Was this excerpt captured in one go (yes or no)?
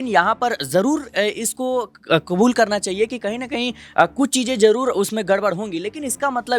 yes